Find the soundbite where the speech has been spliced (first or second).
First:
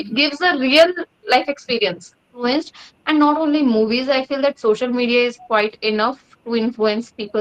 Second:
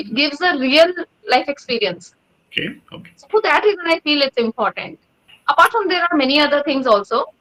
first